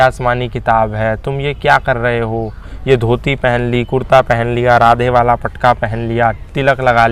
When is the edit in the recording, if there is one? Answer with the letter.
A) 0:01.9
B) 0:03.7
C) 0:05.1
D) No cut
D